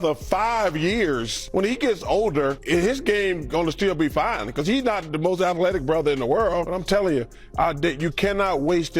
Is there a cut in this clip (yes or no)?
yes